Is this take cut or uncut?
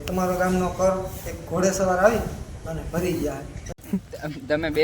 cut